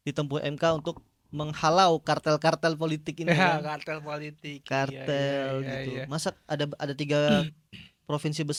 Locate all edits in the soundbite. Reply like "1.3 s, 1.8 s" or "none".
none

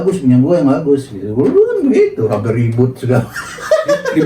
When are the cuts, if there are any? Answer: none

